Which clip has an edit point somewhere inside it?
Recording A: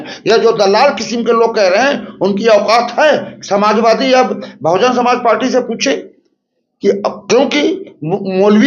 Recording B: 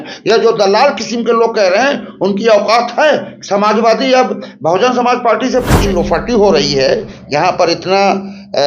B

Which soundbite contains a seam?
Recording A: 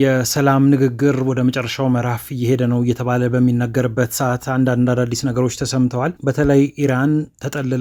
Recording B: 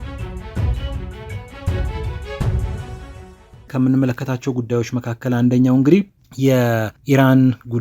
B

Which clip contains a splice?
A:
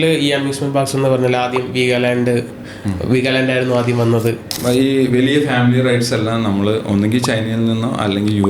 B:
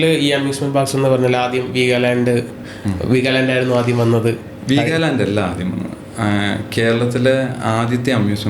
A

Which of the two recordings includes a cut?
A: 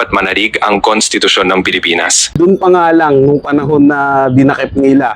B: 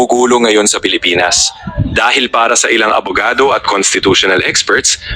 A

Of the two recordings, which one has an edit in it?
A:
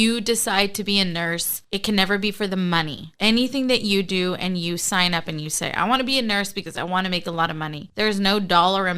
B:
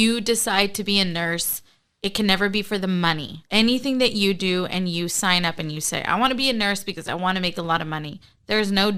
A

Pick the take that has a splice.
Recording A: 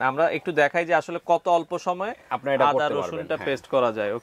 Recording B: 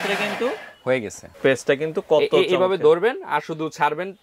B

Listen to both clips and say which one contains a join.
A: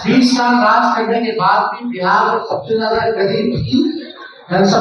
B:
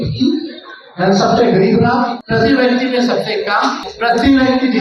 B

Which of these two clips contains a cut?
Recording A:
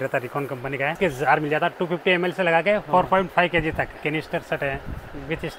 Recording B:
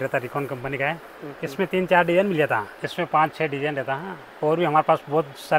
A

